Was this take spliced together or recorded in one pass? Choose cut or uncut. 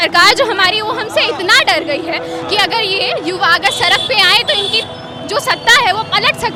uncut